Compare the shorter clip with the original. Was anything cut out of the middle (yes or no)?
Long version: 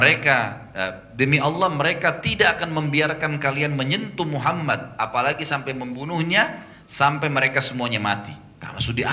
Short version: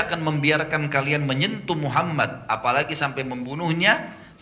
no